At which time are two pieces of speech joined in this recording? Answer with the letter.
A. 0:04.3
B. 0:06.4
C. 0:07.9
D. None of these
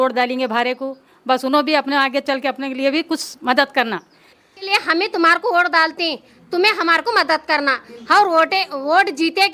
A